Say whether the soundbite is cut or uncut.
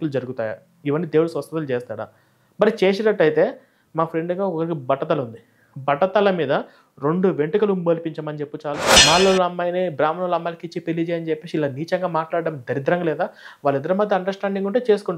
cut